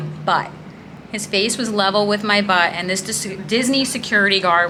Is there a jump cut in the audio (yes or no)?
no